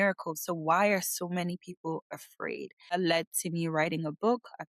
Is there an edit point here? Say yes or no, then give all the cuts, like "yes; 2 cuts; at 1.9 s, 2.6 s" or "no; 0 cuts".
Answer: yes; 1 cut; at 2.9 s